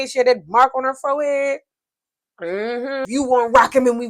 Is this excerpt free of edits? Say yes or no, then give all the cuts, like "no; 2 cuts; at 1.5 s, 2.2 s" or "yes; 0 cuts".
no; 1 cut; at 3.1 s